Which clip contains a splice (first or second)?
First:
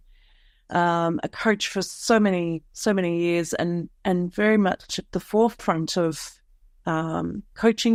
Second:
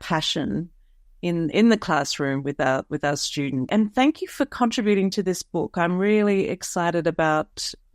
second